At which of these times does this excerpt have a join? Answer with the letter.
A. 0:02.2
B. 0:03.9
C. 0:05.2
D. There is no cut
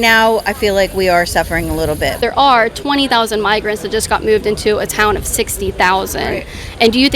A